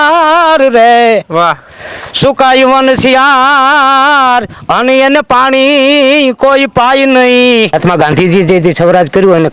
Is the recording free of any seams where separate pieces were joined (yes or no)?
no